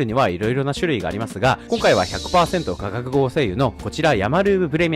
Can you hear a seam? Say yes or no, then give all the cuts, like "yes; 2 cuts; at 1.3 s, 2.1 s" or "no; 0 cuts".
no; 0 cuts